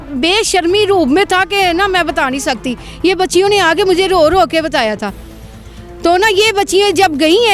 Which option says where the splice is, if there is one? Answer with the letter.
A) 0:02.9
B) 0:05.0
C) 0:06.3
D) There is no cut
D